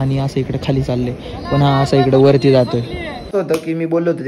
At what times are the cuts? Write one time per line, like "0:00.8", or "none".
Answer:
0:03.3